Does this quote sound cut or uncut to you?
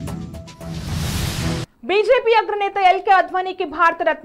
cut